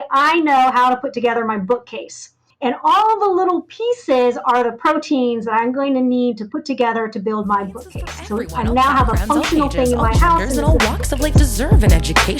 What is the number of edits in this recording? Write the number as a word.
one